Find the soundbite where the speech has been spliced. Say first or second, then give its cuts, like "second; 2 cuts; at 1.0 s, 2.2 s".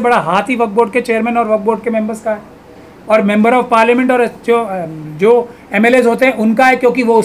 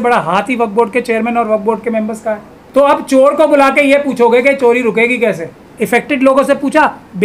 second; 2 cuts; at 2.5 s, 5.7 s